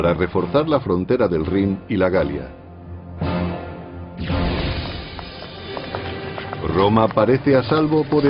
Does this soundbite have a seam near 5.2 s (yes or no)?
no